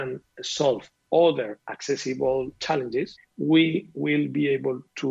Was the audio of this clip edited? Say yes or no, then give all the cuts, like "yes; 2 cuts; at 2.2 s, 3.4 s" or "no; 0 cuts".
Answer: yes; 1 cut; at 3.2 s